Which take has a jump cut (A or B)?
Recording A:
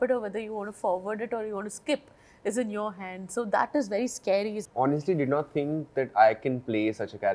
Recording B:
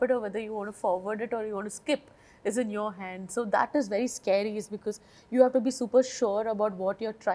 A